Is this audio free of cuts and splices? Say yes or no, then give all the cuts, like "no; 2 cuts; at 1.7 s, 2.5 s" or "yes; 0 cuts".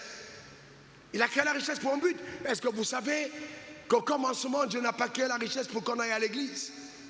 yes; 0 cuts